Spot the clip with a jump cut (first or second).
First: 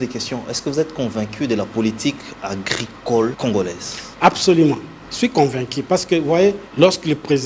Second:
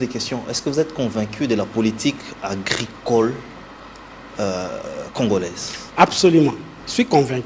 first